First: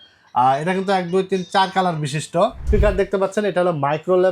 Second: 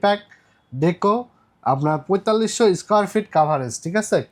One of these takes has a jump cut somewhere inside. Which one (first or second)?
first